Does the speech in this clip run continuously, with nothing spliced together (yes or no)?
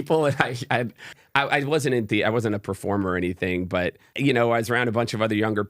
no